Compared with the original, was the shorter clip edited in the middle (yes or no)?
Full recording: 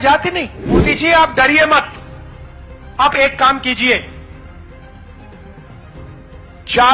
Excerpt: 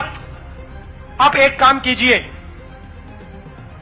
yes